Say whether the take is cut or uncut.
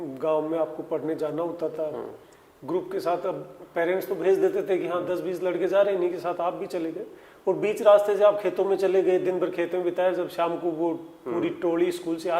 uncut